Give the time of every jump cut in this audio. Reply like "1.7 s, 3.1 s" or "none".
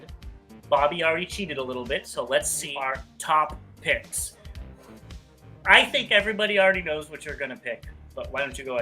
2.6 s